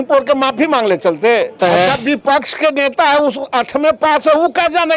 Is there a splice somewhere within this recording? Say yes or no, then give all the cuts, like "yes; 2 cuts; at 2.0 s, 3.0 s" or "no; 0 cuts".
yes; 1 cut; at 1.6 s